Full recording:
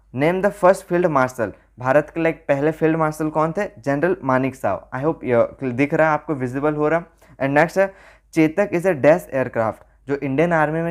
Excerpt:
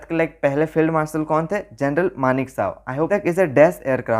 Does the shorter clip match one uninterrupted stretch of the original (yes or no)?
no